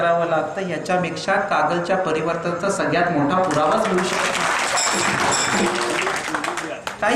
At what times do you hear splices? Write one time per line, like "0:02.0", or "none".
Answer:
none